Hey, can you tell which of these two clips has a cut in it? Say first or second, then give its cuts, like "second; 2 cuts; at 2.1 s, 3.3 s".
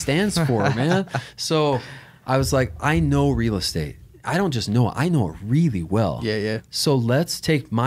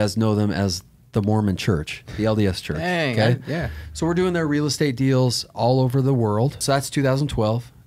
second; 1 cut; at 6.6 s